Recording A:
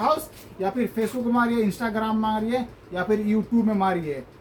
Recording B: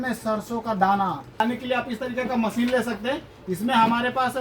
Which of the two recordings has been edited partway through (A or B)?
B